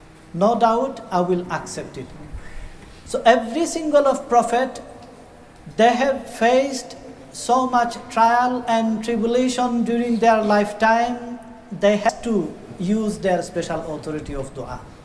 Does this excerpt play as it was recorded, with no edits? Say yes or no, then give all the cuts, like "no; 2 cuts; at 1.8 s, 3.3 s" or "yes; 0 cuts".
no; 1 cut; at 12.1 s